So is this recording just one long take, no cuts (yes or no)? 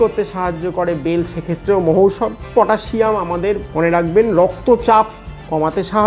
no